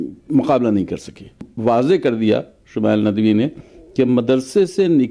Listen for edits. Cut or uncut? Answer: cut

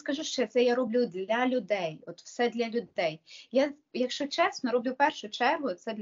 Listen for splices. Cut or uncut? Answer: uncut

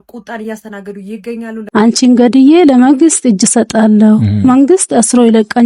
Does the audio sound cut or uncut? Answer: cut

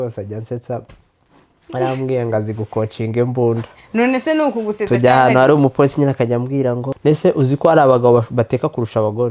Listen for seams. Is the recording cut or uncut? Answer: cut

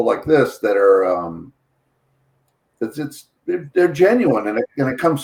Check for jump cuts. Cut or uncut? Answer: uncut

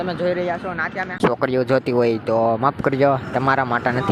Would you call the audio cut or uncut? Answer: cut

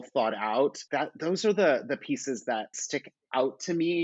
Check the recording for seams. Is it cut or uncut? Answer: cut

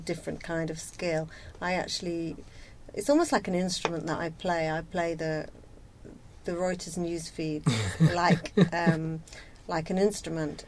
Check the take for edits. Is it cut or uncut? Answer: uncut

